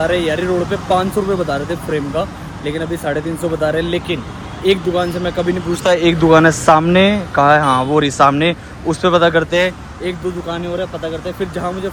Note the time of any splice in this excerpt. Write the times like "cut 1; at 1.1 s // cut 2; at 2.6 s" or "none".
none